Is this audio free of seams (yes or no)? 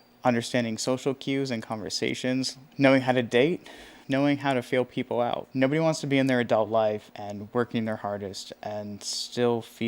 no